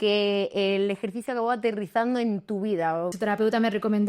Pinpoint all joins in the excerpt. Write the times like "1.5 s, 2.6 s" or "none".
3.1 s